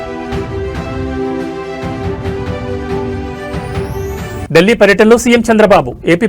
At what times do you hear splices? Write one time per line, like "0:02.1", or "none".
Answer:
0:04.4